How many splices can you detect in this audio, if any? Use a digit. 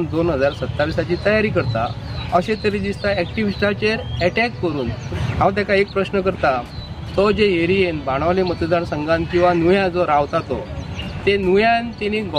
1